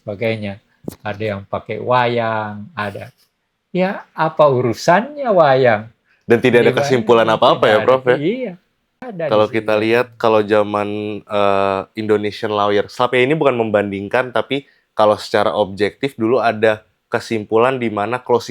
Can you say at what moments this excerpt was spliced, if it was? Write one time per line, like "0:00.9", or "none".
0:09.1